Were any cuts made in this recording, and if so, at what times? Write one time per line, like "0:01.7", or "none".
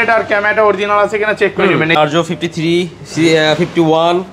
0:02.0